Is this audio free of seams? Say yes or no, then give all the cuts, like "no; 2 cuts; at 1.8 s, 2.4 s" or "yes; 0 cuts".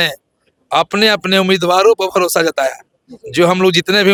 yes; 0 cuts